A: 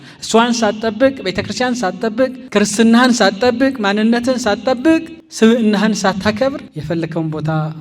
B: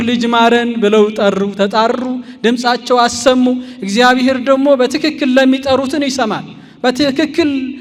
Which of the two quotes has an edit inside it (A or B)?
A